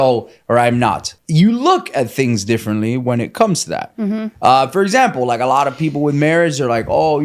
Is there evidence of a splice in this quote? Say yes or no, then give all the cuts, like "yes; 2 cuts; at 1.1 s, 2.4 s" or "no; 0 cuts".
yes; 1 cut; at 1.1 s